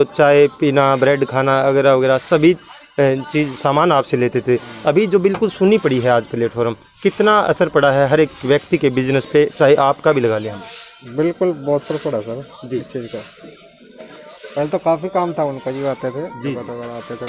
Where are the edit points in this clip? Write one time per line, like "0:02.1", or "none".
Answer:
none